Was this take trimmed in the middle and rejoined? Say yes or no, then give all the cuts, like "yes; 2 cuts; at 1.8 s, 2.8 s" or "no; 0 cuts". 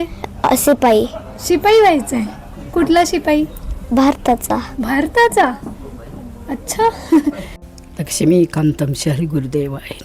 no; 0 cuts